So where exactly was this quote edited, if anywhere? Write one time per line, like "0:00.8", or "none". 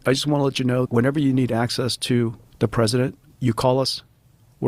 0:00.9
0:02.4
0:03.3

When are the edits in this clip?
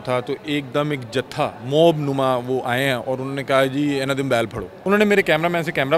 0:04.7

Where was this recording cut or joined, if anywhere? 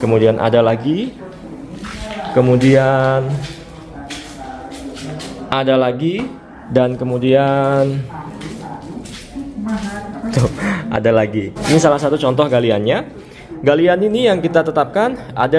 0:11.6

